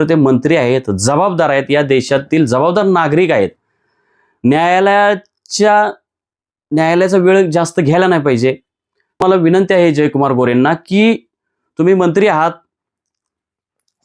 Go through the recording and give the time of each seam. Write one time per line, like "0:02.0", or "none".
0:09.2